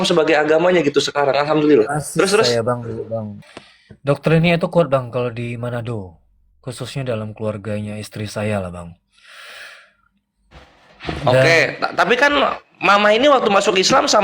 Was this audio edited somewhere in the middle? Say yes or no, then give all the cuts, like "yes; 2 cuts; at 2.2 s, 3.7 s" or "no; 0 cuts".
yes; 1 cut; at 3.4 s